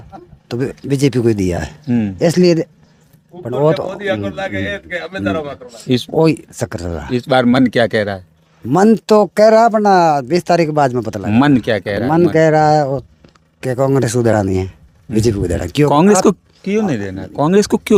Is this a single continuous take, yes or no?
yes